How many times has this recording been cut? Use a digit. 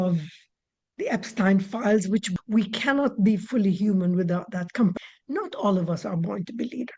2